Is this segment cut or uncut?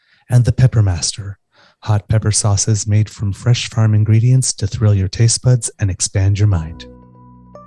cut